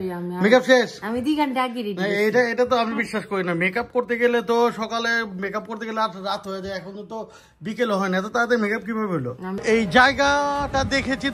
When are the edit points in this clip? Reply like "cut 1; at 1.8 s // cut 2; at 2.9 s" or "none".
cut 1; at 9.6 s